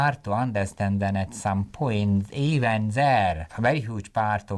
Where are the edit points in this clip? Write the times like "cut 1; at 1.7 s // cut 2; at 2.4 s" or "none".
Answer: cut 1; at 3.6 s